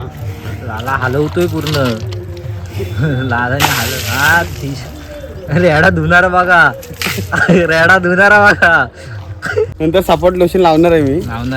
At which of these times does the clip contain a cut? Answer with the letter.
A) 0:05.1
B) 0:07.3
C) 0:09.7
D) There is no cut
C